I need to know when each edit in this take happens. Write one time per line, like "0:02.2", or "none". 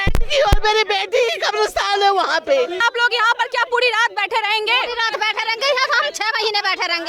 0:02.8